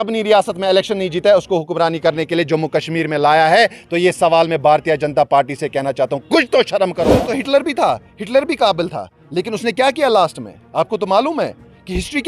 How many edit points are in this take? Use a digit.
1